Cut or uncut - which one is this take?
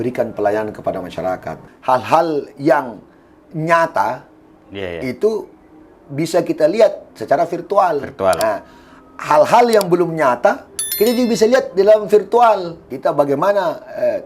cut